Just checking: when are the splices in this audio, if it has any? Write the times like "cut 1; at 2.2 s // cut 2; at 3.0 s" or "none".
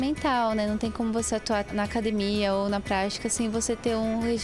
cut 1; at 1.7 s